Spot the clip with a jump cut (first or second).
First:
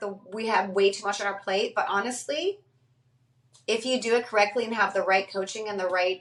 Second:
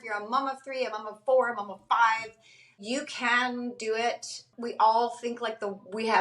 second